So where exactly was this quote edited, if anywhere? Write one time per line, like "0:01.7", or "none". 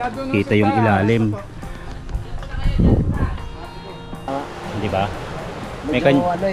0:04.3